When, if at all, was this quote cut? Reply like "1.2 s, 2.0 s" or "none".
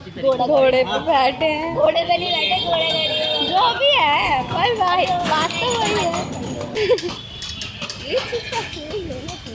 6.7 s